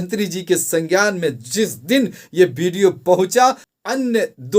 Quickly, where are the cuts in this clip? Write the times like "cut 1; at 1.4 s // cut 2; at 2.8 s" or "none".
cut 1; at 3.7 s